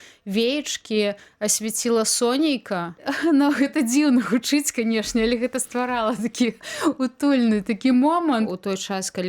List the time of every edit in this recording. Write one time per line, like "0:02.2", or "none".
0:03.1
0:08.5

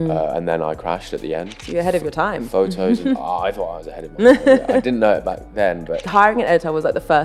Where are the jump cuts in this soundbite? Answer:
0:01.5
0:06.0

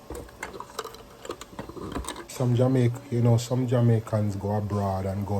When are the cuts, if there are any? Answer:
0:02.3

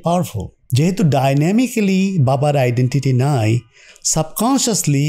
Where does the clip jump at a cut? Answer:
none

